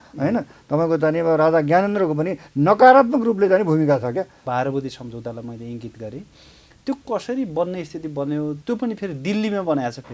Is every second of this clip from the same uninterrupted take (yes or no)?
no